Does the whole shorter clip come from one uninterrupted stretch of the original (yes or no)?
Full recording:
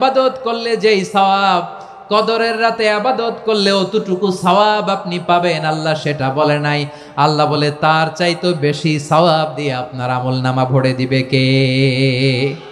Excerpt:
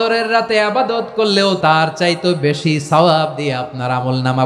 no